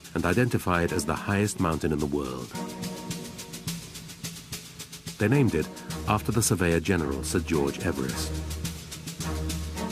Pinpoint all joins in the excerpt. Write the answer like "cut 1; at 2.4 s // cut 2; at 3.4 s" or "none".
cut 1; at 7.8 s